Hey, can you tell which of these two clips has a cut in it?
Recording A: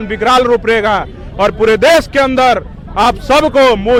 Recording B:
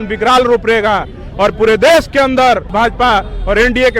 B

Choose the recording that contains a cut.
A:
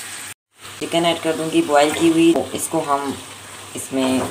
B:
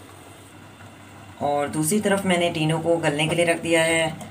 A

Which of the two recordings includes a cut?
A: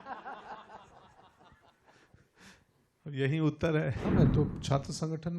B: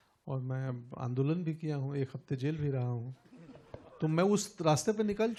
A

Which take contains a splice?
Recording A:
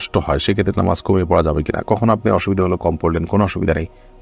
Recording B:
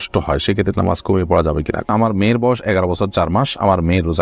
B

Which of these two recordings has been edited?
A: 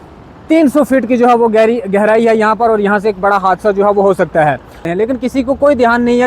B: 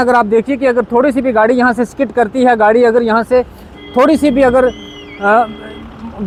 A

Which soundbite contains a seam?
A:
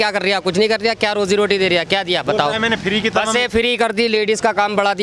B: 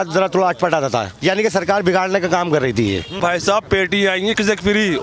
B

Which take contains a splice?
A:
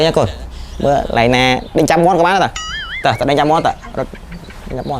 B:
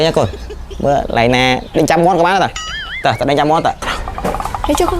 B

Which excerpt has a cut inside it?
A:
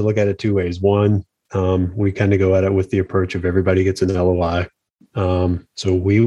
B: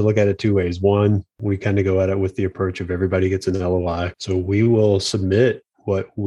B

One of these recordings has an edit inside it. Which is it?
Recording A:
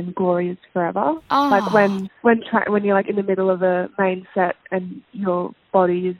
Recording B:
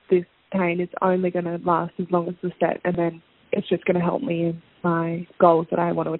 A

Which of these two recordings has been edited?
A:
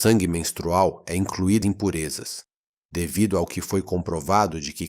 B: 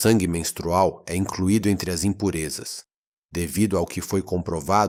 A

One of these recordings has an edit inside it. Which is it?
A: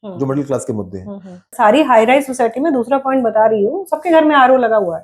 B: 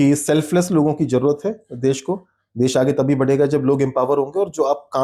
A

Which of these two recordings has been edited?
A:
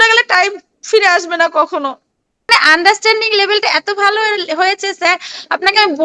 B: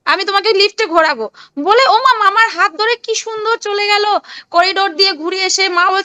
A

